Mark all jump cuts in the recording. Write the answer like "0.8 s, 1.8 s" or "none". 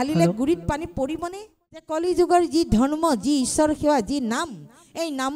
1.9 s